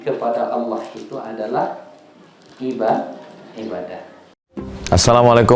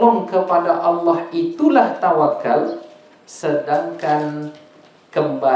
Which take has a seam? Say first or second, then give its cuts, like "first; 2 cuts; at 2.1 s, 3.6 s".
first; 1 cut; at 4.3 s